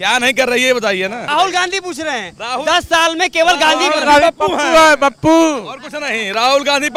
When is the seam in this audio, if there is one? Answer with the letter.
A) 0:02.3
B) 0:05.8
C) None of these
C